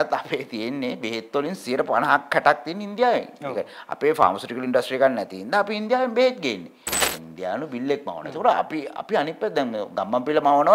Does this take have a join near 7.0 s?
yes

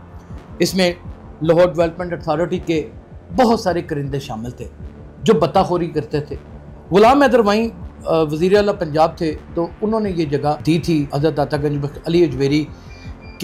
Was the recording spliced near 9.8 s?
no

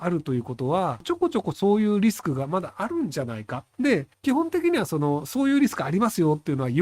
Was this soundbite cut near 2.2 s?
no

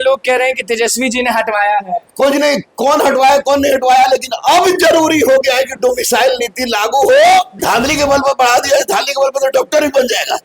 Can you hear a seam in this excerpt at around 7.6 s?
yes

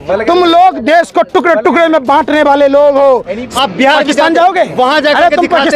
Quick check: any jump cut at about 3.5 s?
yes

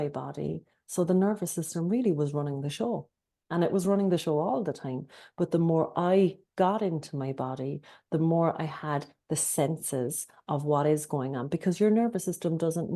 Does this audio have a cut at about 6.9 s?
no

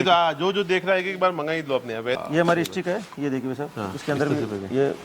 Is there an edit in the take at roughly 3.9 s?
no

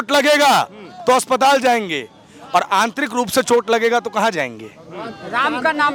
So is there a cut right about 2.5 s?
no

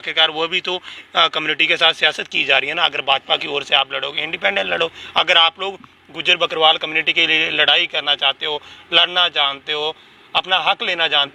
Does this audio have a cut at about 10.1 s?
no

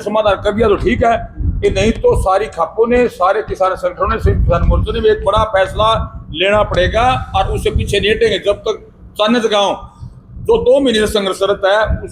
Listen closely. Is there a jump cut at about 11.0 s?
no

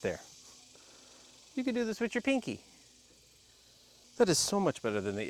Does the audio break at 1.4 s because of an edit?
no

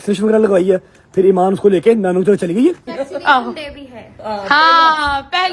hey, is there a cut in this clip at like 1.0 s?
no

